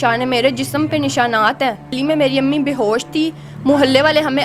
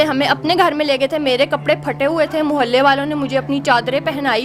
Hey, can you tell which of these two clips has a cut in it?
first; 1 cut; at 2.0 s

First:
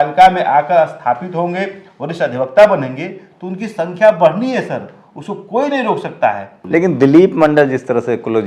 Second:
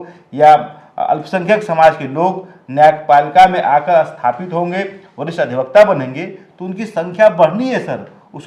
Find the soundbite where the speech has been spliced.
first; 1 cut; at 6.5 s

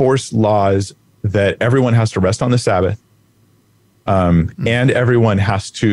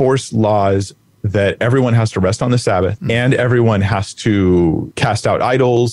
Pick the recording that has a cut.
second; 2 cuts; at 3.0 s, 4.9 s

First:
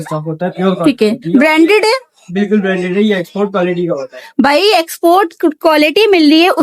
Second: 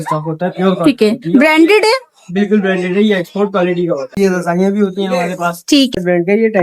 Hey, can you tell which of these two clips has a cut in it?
second; 2 cuts; at 4.2 s, 5.9 s

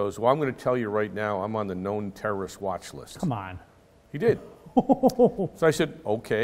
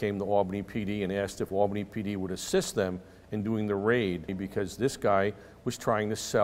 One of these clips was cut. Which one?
second; 1 cut; at 4.4 s

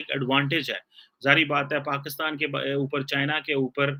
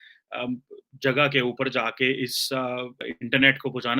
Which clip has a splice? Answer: second; 1 cut; at 3.0 s

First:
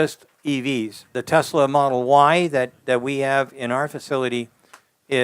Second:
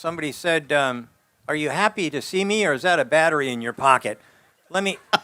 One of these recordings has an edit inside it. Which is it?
first; 1 cut; at 1.2 s

